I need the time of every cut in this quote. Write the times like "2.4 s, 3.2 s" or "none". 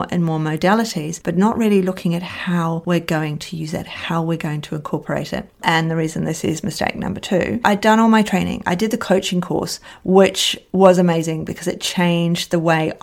5.6 s, 7.6 s